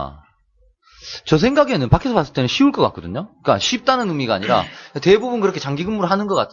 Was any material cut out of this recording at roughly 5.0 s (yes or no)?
no